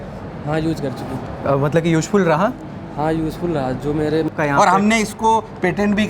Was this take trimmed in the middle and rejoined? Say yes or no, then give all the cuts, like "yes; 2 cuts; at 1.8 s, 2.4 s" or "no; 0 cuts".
yes; 1 cut; at 4.3 s